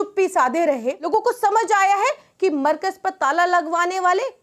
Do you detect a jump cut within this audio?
yes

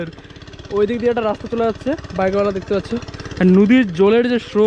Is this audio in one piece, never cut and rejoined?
yes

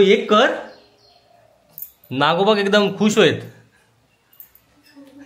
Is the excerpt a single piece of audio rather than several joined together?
yes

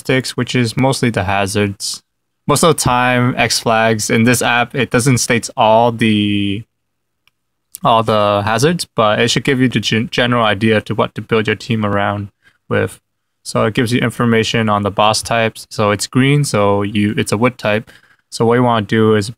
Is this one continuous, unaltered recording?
no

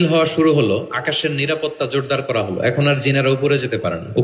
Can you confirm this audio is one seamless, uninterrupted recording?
yes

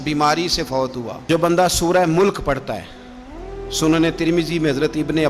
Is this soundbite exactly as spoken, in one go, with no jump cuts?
no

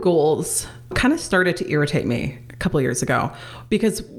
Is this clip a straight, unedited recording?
no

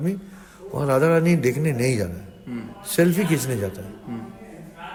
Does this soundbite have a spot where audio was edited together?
no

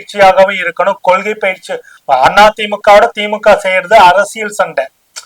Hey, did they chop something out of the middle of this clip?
yes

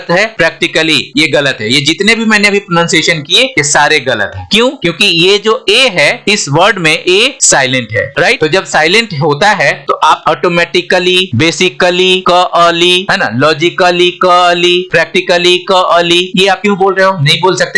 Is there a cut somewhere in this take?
yes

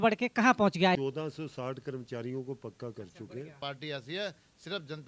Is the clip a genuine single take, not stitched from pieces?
no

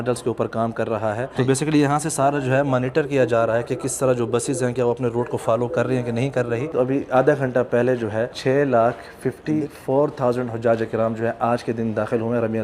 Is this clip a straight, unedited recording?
no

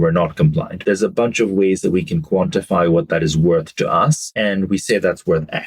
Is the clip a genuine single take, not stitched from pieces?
no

